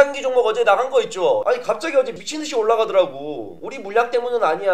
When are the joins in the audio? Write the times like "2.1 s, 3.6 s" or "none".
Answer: 1.4 s

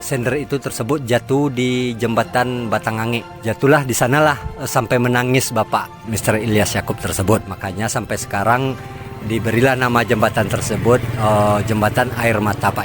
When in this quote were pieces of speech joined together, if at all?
4.0 s

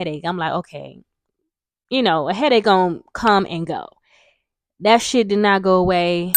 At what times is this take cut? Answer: none

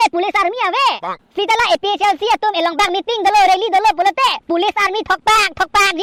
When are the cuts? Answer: none

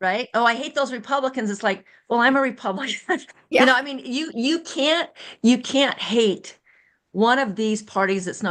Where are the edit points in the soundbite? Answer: none

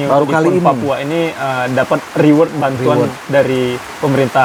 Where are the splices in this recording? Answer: none

